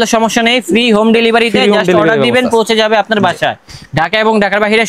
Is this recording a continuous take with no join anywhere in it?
yes; 0 cuts

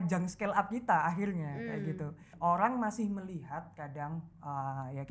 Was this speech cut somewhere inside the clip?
yes; 1 cut; at 2.3 s

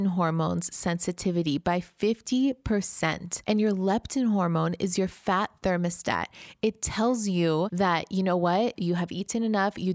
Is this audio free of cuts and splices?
no; 2 cuts; at 3.3 s, 7.7 s

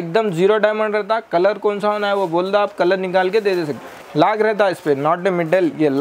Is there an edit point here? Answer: yes; 1 cut; at 4.0 s

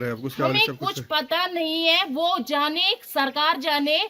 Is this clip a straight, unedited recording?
yes; 0 cuts

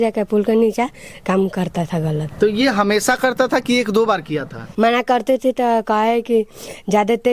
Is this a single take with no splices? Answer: no; 2 cuts; at 2.3 s, 4.7 s

